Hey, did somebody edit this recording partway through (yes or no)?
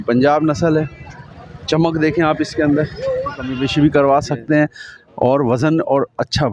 yes